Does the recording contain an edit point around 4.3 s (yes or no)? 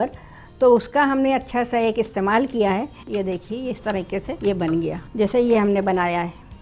yes